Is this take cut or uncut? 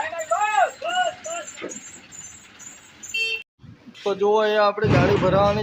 cut